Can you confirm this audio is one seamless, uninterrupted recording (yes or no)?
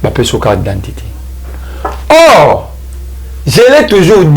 yes